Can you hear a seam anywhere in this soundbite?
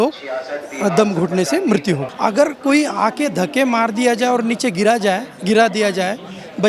yes; 1 cut; at 2.1 s

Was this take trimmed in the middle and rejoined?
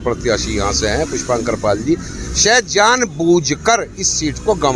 no; 0 cuts

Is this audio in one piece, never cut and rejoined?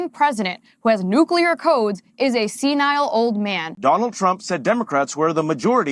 no; 1 cut; at 3.7 s

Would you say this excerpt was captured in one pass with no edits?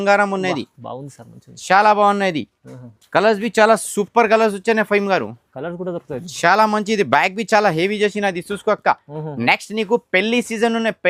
yes; 0 cuts

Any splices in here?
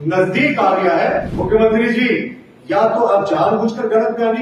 yes; 1 cut; at 1.3 s

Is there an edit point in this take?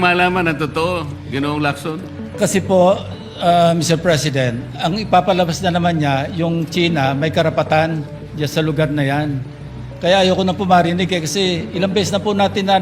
no; 0 cuts

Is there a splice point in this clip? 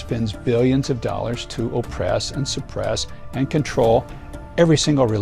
no; 0 cuts

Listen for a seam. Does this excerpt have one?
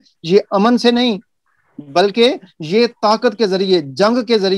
no; 0 cuts

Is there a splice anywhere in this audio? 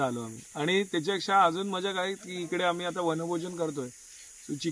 no; 0 cuts

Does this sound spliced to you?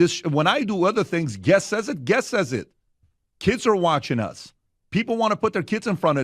yes; 1 cut; at 1.3 s

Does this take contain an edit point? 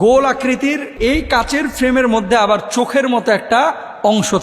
yes; 1 cut; at 0.9 s

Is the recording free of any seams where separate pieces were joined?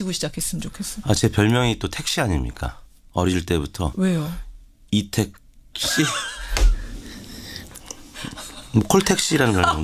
yes; 0 cuts

